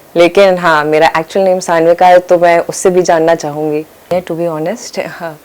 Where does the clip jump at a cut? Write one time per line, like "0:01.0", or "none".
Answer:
0:04.1